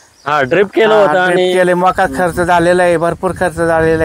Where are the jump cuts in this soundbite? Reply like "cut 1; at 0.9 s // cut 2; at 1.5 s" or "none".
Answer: none